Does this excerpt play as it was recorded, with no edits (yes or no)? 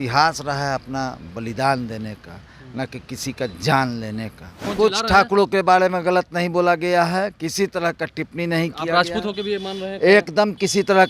no